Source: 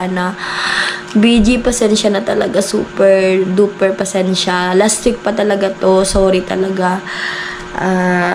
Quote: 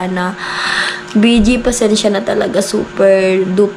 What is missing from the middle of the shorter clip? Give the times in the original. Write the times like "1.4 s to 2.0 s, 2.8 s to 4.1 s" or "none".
none